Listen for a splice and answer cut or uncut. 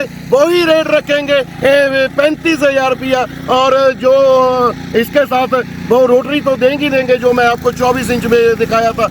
uncut